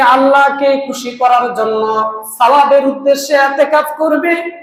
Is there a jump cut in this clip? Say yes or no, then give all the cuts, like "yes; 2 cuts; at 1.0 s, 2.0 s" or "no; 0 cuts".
no; 0 cuts